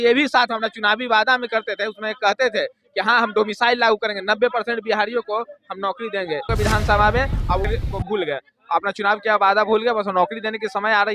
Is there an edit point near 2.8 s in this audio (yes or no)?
no